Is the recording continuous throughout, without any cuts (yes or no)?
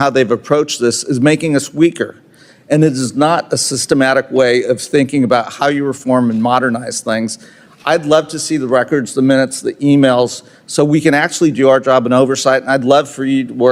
yes